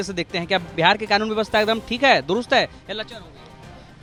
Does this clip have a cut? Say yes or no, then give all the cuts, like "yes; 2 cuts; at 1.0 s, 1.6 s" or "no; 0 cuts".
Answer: no; 0 cuts